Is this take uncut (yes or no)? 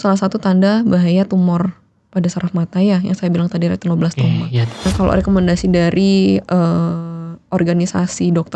no